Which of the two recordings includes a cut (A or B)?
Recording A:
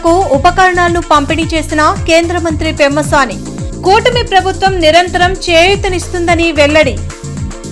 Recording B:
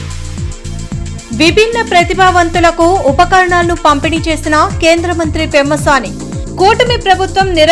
B